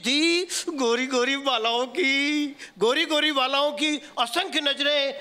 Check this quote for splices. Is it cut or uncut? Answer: uncut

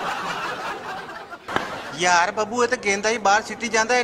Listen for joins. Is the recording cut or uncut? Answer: cut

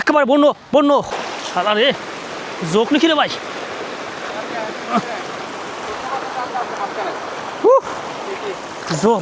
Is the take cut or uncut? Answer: cut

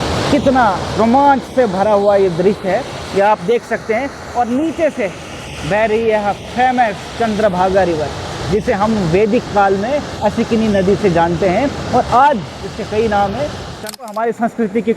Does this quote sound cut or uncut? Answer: cut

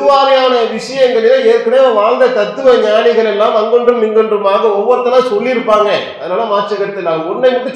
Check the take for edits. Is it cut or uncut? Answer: uncut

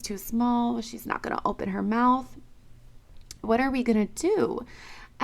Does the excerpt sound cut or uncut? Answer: cut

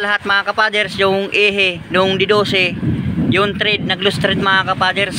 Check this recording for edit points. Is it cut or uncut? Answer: uncut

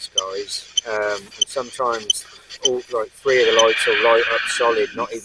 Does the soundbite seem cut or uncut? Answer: uncut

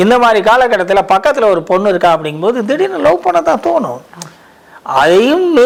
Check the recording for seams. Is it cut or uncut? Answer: uncut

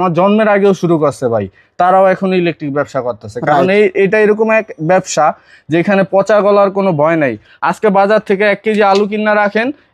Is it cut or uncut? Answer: uncut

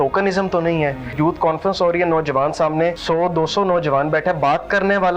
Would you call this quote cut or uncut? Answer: cut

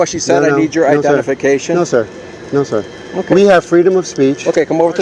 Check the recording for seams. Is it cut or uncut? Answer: uncut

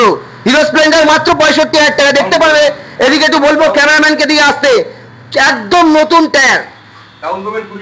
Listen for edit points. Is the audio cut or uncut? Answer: uncut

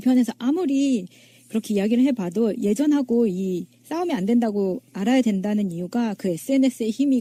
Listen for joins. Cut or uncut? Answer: uncut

